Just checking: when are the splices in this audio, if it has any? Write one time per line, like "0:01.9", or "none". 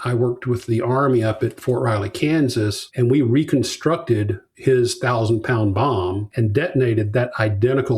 0:06.3